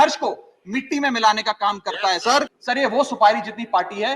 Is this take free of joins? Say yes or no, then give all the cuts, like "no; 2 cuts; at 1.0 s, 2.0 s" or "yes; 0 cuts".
no; 1 cut; at 2.5 s